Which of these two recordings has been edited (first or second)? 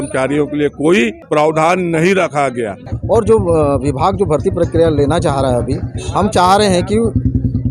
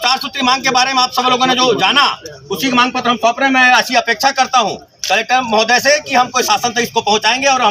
first